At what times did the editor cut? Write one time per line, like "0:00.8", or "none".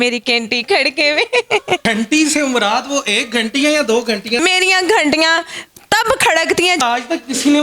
0:01.8
0:04.4
0:06.8

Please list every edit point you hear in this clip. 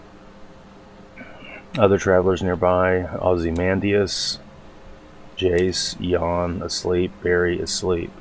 0:00.9

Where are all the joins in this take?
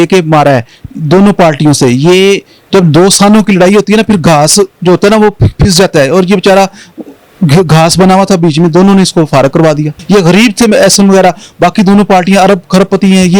0:10.0

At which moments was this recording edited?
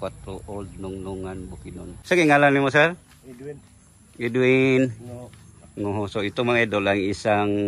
0:01.9

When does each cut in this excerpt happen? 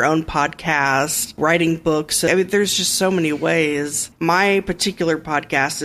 0:01.4
0:02.3
0:04.1

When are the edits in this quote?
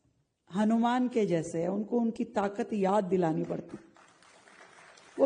none

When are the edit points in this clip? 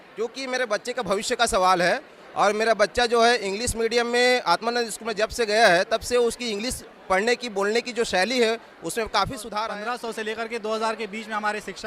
0:09.5

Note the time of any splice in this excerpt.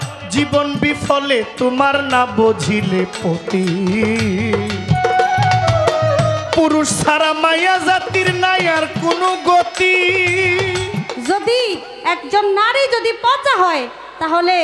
0:11.0

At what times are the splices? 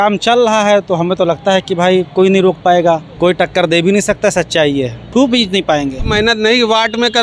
0:03.1
0:05.0
0:06.1

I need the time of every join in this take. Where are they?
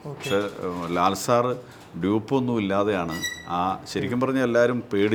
none

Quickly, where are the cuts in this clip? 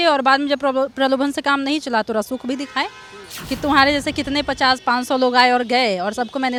none

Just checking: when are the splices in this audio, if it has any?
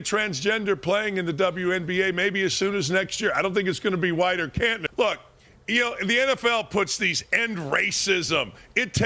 0:04.8

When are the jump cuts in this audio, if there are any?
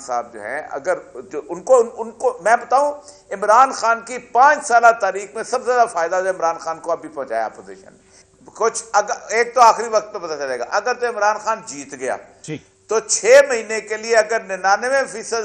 0:08.1

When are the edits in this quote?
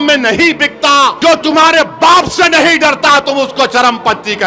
0:01.2

